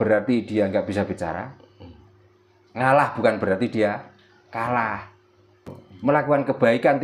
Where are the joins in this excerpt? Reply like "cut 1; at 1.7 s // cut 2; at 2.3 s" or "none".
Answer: cut 1; at 5.8 s